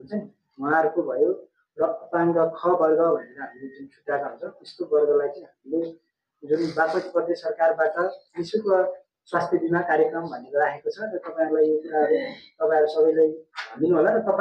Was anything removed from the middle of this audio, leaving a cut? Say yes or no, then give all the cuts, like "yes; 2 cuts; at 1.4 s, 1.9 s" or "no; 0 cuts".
no; 0 cuts